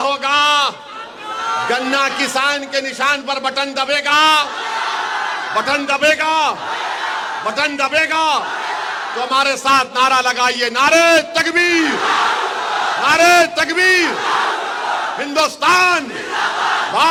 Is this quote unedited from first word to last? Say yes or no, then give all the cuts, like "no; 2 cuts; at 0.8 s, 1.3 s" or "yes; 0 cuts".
yes; 0 cuts